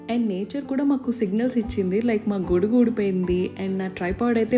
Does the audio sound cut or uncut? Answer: uncut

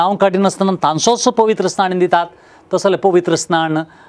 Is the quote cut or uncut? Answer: uncut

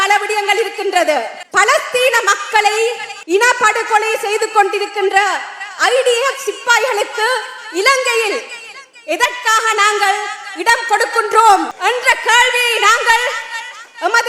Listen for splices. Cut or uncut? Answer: cut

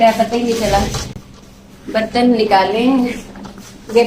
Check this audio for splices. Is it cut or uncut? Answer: uncut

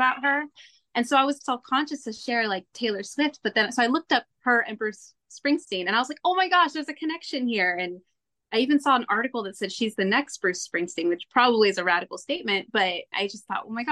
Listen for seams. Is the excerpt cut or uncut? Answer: uncut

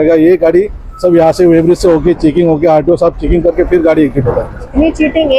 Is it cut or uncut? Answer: uncut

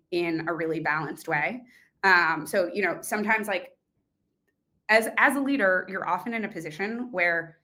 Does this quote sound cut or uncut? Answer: uncut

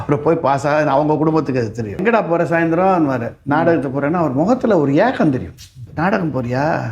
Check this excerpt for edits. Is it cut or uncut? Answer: cut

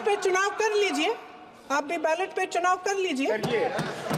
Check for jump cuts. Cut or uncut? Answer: uncut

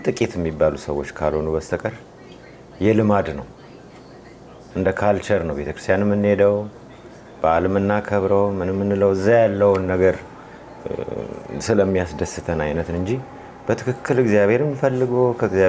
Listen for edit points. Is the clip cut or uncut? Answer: uncut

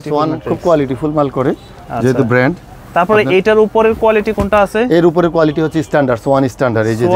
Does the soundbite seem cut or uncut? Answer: uncut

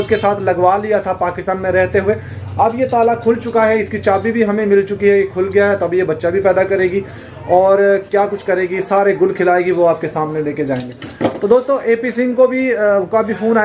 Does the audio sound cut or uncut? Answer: uncut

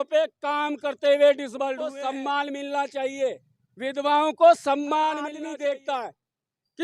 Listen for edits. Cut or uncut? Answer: cut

